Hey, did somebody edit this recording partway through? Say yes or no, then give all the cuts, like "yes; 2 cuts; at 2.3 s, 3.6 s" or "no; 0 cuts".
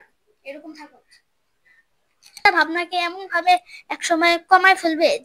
yes; 1 cut; at 2.4 s